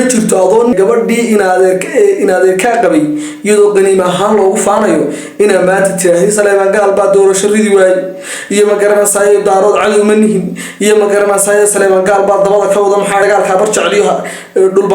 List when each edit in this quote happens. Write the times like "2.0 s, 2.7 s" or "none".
0.7 s, 13.2 s